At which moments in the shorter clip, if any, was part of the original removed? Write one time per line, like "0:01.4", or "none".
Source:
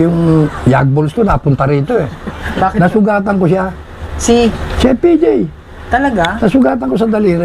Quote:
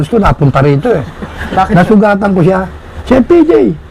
0:02.9